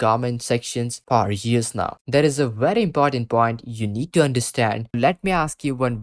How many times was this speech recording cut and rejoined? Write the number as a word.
two